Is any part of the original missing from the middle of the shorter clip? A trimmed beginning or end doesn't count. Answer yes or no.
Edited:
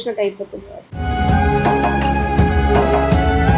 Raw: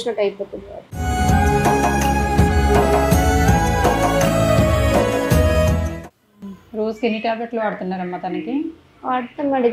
no